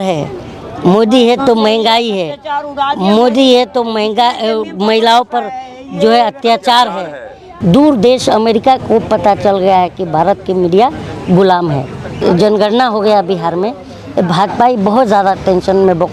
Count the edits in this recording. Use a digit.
2